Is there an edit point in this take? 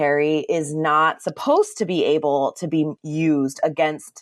no; 0 cuts

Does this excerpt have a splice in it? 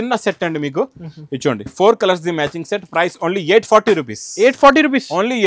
no; 0 cuts

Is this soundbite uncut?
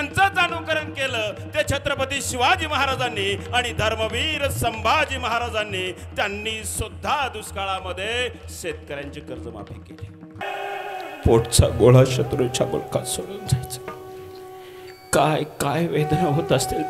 no; 1 cut; at 10.2 s

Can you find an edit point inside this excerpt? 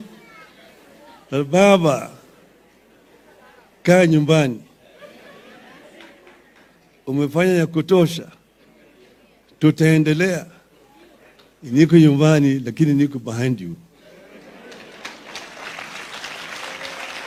no; 0 cuts

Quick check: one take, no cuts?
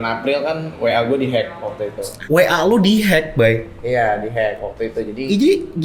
yes; 0 cuts

